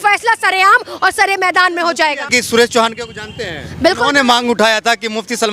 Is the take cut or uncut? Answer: cut